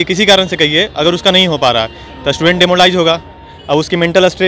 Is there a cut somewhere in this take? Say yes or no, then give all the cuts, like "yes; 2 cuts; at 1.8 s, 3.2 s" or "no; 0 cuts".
no; 0 cuts